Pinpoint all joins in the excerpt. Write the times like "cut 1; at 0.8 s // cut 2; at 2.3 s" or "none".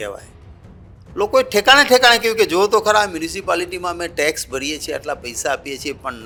none

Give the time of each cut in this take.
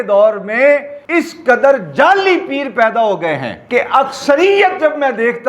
cut 1; at 1.0 s // cut 2; at 3.5 s

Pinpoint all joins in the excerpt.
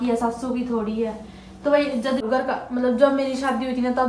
cut 1; at 2.2 s

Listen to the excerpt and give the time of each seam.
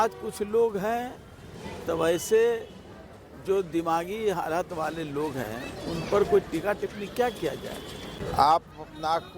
cut 1; at 8.2 s

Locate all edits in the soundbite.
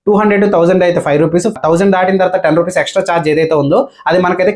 cut 1; at 1.6 s

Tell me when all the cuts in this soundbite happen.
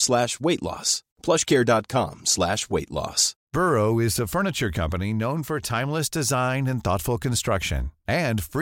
cut 1; at 3.3 s

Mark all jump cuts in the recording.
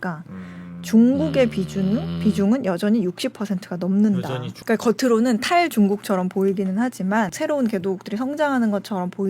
cut 1; at 4.5 s // cut 2; at 7.3 s

